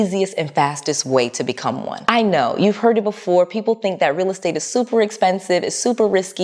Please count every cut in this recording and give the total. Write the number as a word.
zero